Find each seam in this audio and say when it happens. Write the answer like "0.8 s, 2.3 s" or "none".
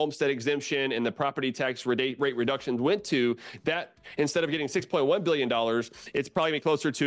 none

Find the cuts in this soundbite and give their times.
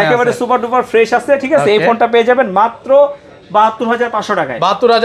none

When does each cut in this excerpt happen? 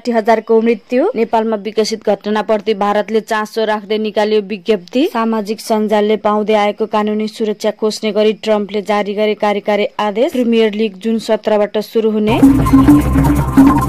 12.4 s

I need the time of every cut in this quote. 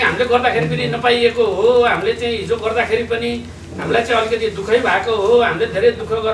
none

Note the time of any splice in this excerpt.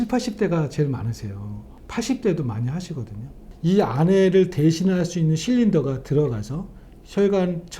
3.4 s

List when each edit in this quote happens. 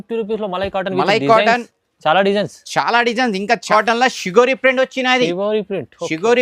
3.6 s

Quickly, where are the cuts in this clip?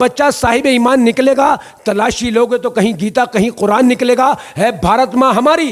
none

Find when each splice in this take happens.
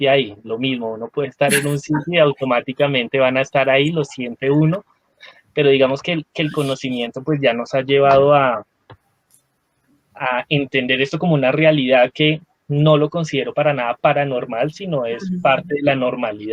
none

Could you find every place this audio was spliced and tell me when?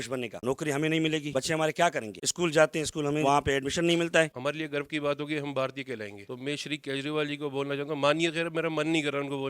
3.2 s, 4.3 s, 6.2 s

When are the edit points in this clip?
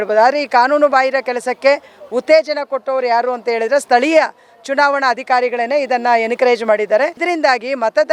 7.2 s

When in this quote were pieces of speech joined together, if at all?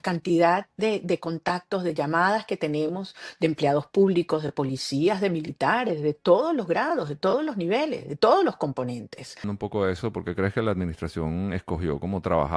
9.5 s

